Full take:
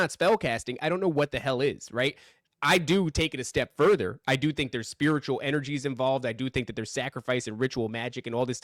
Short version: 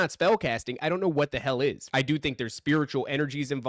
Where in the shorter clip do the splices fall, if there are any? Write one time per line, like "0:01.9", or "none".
0:01.8